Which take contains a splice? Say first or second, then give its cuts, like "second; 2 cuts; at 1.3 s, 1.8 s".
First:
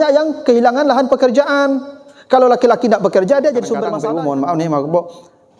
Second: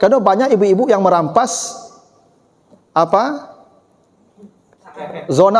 first; 1 cut; at 3.9 s